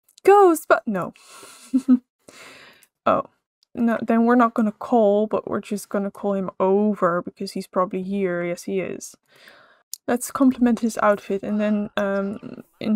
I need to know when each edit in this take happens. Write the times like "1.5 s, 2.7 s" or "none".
none